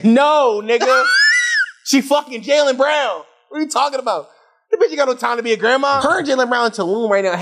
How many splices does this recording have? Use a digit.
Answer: 1